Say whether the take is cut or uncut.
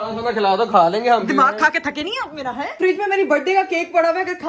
cut